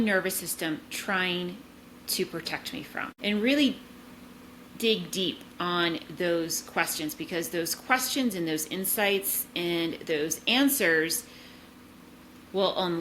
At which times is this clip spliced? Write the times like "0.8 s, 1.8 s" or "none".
none